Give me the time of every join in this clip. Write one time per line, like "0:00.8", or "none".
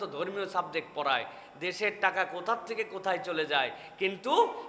none